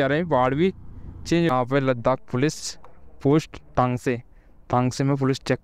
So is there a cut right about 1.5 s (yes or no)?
yes